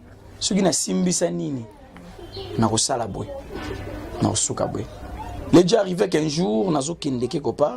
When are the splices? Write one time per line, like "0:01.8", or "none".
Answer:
0:05.3